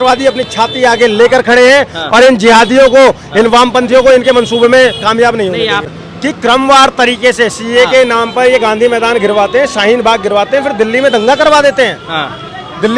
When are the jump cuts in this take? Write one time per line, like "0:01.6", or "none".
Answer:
0:06.0